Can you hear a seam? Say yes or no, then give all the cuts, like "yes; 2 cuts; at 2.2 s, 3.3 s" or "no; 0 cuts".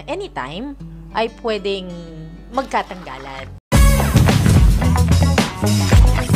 yes; 1 cut; at 3.6 s